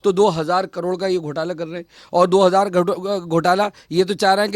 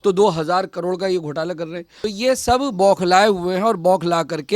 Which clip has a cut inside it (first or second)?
second